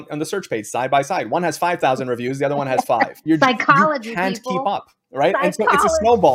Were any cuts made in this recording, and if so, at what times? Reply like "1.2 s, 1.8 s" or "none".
none